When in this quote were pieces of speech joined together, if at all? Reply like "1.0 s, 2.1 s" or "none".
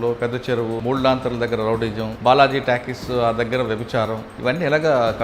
0.8 s, 2.1 s, 4.3 s